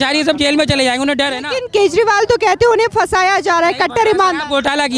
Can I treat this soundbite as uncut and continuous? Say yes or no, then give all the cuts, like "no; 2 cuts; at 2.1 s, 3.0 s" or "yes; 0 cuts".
yes; 0 cuts